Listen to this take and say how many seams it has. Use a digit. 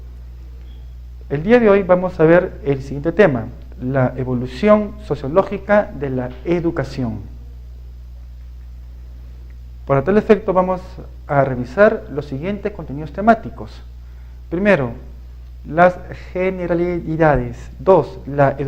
1